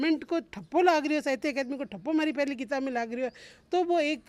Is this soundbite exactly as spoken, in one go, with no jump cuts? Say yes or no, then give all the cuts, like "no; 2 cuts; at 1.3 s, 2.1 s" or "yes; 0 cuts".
yes; 0 cuts